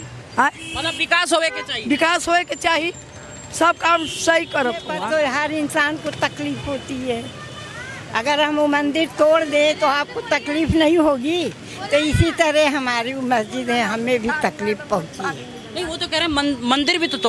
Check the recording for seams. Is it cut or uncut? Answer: cut